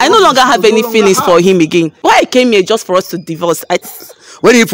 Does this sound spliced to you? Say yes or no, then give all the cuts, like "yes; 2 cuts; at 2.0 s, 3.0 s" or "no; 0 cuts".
yes; 2 cuts; at 2.0 s, 3.9 s